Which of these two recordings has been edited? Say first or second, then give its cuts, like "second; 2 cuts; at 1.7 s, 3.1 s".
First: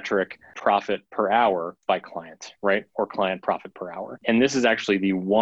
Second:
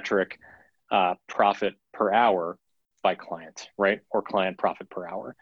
first; 3 cuts; at 0.9 s, 1.7 s, 4.2 s